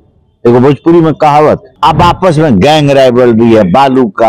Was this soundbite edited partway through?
yes; 1 cut; at 1.7 s

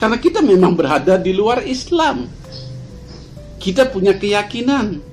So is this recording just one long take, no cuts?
yes; 0 cuts

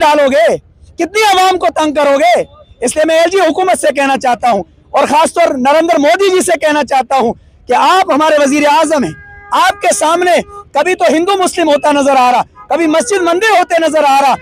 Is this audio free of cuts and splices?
yes; 0 cuts

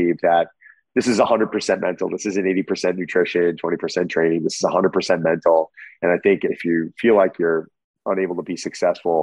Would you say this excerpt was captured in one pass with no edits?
no; 1 cut; at 6.5 s

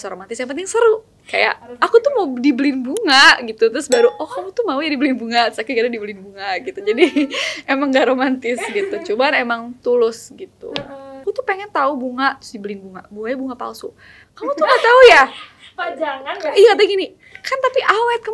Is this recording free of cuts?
no; 2 cuts; at 1.2 s, 11.1 s

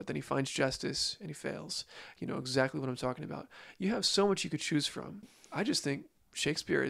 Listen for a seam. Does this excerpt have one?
yes; 1 cut; at 5.4 s

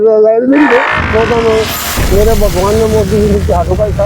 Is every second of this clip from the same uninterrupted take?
no; 1 cut; at 1.1 s

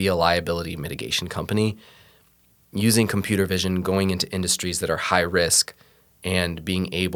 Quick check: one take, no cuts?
yes; 0 cuts

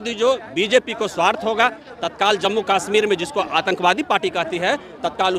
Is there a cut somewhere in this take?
no; 0 cuts

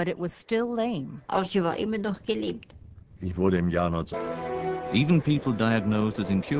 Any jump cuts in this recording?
no; 0 cuts

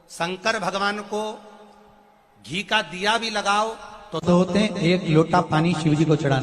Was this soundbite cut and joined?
yes; 1 cut; at 4.2 s

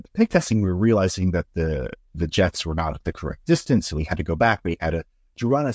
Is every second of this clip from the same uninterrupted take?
yes; 0 cuts

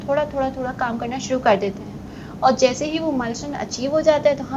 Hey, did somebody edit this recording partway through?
no; 0 cuts

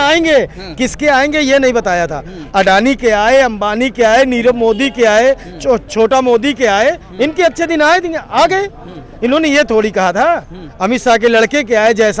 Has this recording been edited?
no; 0 cuts

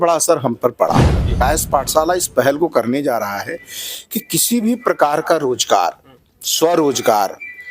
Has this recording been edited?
yes; 1 cut; at 1.4 s

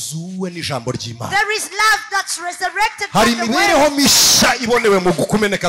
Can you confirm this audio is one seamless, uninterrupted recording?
yes; 0 cuts

